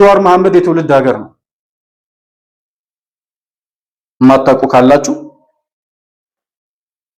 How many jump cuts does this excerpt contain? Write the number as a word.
zero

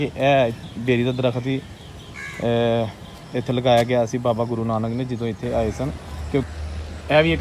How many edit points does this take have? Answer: one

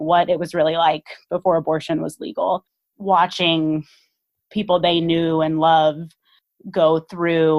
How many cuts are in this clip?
one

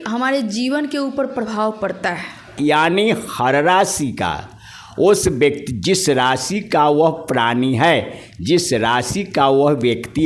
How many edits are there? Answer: one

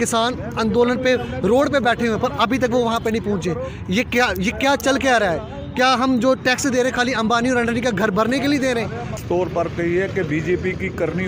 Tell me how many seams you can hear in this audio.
one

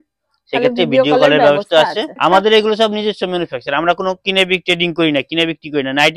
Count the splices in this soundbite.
one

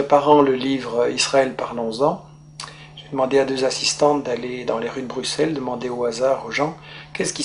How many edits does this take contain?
zero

